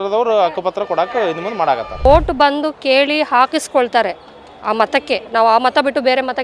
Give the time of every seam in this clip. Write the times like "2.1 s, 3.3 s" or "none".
2.1 s